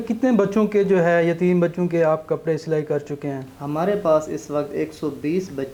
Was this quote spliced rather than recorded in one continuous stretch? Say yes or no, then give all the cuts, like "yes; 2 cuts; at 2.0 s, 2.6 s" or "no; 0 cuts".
no; 0 cuts